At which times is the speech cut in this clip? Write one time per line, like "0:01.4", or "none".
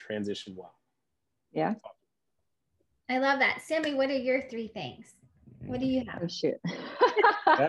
none